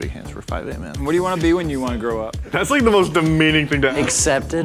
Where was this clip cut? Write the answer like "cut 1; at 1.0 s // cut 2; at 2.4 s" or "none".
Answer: none

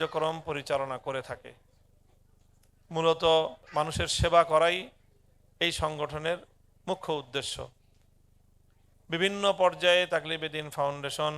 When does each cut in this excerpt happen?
cut 1; at 3.6 s

